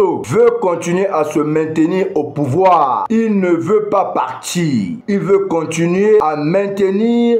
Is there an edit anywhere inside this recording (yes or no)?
no